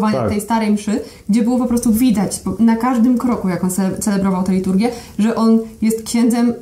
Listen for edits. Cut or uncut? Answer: uncut